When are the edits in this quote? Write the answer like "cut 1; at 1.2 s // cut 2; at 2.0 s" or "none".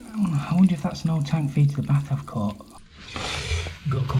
cut 1; at 2.9 s